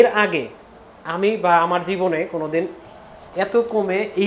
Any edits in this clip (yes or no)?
no